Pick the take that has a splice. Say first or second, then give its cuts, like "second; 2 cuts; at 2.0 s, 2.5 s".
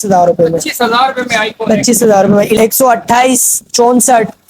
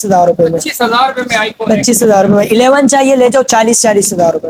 first; 1 cut; at 2.6 s